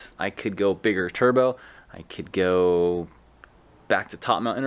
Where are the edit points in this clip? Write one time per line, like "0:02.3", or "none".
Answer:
none